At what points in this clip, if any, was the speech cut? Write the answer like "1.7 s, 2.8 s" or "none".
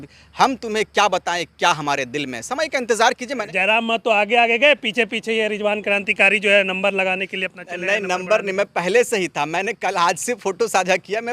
3.5 s